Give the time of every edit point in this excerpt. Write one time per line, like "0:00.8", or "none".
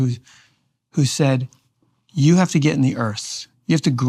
none